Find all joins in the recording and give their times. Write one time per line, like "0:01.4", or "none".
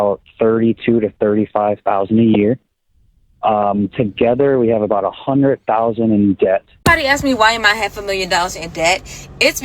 0:06.7